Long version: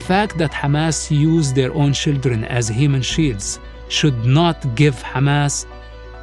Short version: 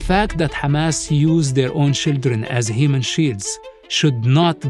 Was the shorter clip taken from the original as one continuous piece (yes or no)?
yes